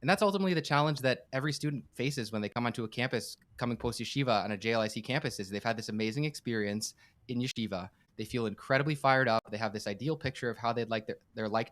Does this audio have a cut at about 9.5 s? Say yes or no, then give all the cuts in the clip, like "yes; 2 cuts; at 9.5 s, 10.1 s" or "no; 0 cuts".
no; 1 cut; at 8.1 s